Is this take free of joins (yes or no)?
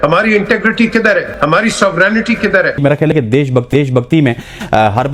no